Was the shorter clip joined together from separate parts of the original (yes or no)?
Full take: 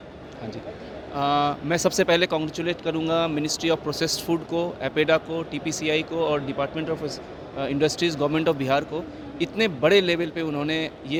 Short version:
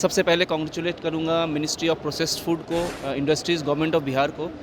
yes